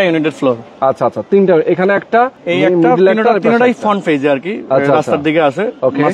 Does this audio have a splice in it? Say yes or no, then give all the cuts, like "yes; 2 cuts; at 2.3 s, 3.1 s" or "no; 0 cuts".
no; 0 cuts